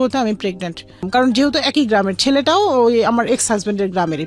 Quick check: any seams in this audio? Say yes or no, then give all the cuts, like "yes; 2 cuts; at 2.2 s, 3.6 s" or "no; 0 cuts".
yes; 1 cut; at 1.1 s